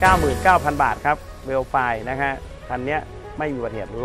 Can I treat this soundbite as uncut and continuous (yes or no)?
yes